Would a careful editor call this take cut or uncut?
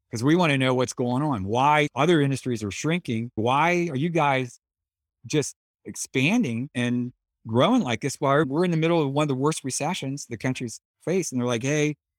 cut